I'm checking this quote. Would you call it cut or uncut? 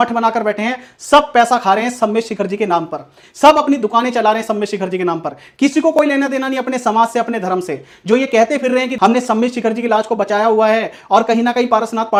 uncut